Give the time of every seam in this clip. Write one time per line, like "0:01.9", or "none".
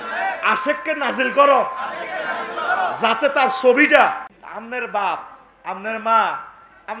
0:04.4